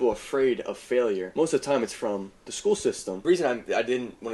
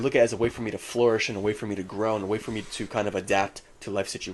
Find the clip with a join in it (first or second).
first